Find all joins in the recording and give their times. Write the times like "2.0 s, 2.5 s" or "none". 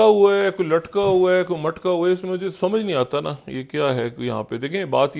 none